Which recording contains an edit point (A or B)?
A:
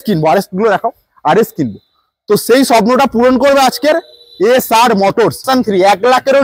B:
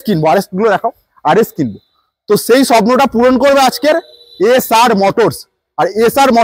A